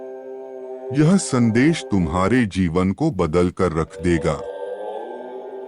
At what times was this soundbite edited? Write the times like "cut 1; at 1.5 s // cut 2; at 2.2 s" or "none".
cut 1; at 0.9 s // cut 2; at 4.3 s